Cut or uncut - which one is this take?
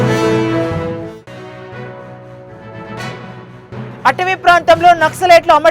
cut